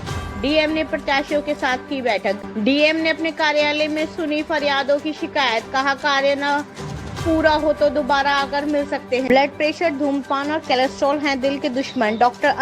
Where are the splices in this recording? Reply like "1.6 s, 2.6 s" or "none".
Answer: 2.4 s, 9.2 s